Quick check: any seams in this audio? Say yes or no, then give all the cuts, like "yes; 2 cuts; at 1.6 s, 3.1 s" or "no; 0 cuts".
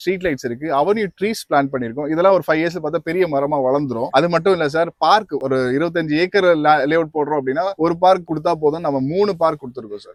no; 0 cuts